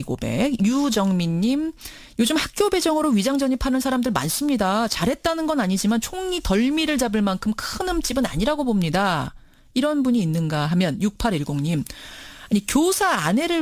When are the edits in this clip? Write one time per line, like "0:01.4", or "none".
0:02.0